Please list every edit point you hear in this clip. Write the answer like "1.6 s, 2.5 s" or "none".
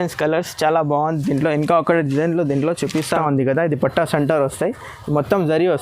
3.1 s